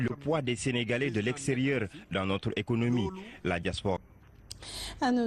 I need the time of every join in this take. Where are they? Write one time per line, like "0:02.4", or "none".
0:02.1